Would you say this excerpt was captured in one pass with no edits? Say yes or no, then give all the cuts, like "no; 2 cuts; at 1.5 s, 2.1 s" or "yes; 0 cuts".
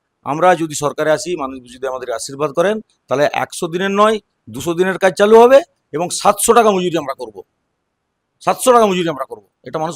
yes; 0 cuts